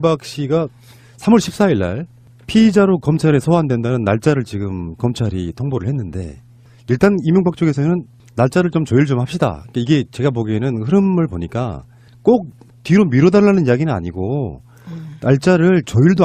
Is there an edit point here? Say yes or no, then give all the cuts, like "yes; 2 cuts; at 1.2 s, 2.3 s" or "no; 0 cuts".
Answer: no; 0 cuts